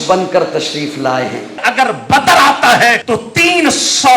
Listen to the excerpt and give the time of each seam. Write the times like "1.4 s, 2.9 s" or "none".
1.6 s, 3.0 s